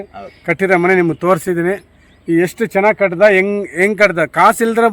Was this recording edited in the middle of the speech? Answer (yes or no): no